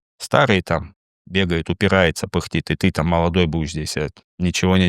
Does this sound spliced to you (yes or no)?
no